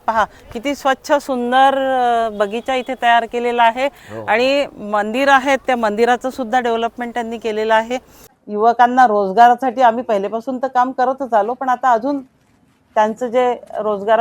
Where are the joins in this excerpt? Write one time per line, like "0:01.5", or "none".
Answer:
0:08.4